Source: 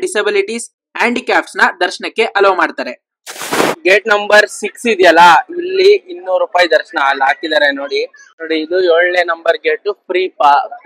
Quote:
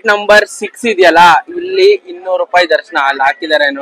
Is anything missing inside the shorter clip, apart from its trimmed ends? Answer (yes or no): no